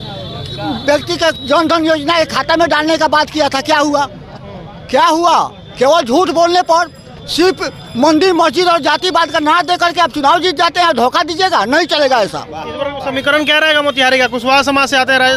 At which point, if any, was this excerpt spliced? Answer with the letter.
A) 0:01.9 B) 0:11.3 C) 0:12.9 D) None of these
D